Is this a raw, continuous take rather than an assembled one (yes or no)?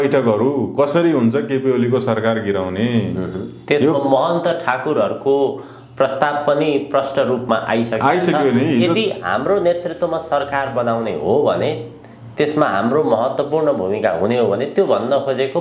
yes